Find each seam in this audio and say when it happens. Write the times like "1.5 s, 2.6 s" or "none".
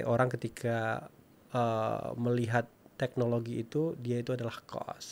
none